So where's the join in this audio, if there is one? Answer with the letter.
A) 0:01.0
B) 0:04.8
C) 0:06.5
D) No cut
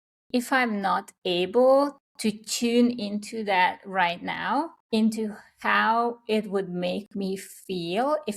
B